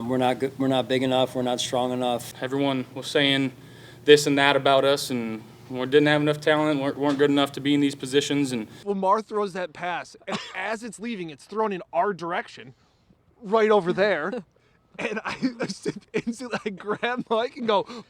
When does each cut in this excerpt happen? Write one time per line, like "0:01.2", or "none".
0:02.4
0:08.7